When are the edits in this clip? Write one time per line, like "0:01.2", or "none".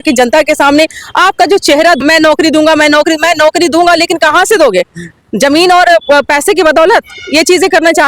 0:02.0